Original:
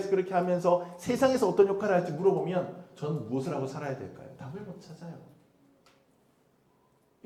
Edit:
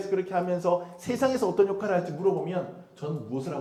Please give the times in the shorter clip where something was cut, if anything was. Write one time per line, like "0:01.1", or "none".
none